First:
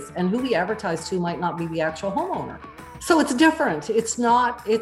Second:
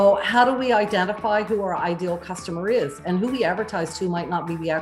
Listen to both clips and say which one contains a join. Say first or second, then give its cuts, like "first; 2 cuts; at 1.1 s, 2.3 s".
first; 1 cut; at 2.9 s